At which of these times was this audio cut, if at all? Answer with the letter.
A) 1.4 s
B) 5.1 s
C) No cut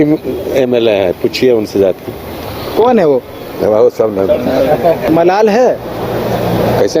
B